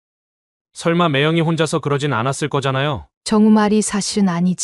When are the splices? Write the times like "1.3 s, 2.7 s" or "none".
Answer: 3.1 s